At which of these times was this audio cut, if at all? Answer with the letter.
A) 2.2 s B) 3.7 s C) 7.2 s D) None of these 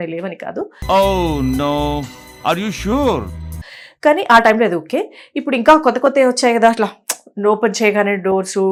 D